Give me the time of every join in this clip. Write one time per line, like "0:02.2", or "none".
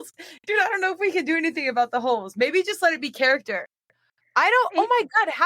none